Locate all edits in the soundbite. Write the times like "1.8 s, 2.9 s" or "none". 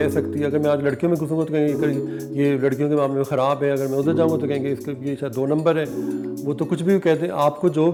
none